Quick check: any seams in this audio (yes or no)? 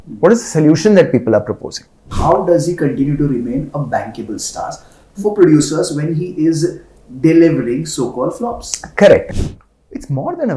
yes